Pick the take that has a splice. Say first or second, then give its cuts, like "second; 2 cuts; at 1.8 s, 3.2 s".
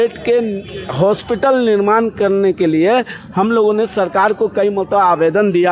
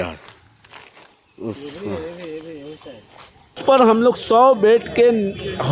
second; 1 cut; at 3.6 s